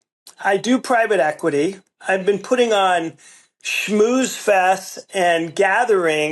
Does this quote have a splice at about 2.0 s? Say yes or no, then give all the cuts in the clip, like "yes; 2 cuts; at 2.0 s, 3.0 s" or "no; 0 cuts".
yes; 1 cut; at 2.0 s